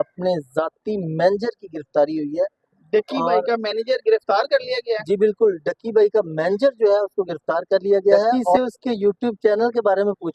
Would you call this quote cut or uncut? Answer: cut